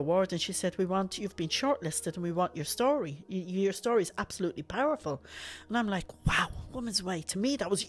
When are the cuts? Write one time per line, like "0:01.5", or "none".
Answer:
none